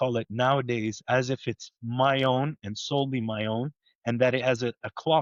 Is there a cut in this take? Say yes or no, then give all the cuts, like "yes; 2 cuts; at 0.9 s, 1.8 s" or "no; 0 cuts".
no; 0 cuts